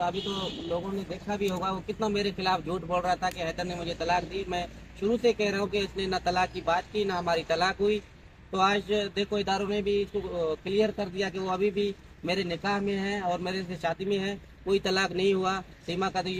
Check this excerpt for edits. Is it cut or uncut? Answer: uncut